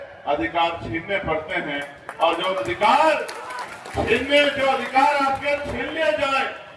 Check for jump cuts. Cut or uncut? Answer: uncut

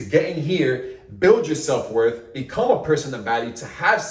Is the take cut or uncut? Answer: uncut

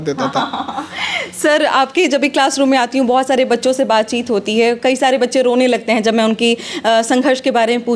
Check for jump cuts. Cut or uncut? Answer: uncut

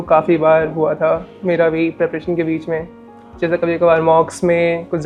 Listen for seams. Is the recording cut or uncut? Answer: uncut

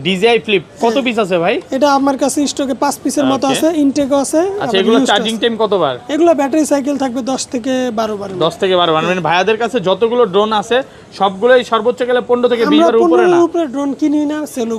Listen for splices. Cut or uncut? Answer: uncut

